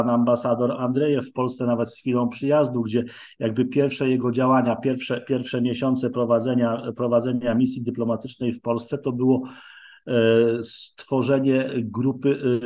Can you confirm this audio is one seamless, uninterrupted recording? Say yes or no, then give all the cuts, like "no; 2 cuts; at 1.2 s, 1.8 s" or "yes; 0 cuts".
yes; 0 cuts